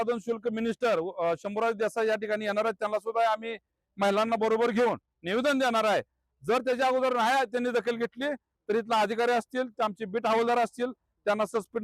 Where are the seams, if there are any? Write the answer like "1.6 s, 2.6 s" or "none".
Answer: none